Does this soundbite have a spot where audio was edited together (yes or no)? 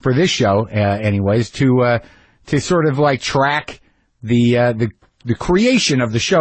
no